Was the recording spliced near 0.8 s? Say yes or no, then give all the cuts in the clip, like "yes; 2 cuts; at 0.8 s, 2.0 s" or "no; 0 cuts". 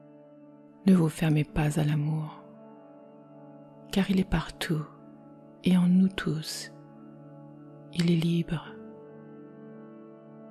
yes; 6 cuts; at 0.8 s, 2.3 s, 3.9 s, 6.5 s, 7.9 s, 8.6 s